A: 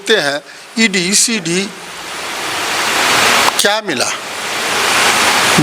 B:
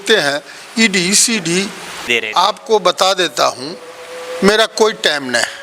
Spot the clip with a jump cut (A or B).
B